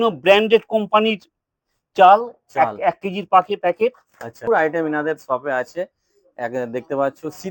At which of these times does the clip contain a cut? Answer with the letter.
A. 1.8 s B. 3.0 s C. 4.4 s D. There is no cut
C